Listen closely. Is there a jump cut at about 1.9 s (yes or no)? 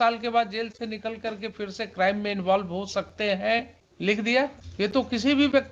no